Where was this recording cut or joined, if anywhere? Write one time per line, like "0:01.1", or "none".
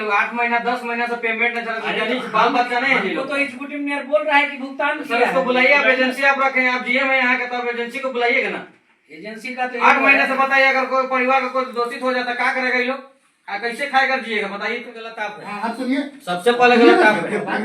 0:15.5